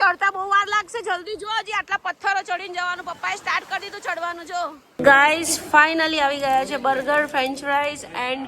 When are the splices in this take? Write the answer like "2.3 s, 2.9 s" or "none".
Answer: 4.9 s

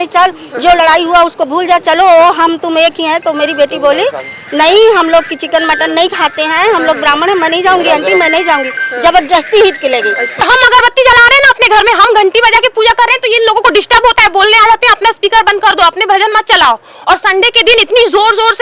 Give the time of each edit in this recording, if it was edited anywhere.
10.4 s

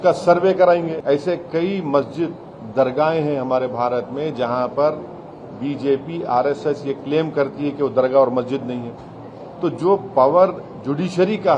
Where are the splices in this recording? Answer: 0.9 s

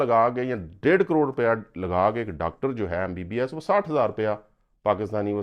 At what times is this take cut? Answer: none

